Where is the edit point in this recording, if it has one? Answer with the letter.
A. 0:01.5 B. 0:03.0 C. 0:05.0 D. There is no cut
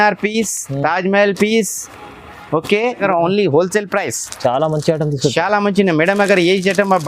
B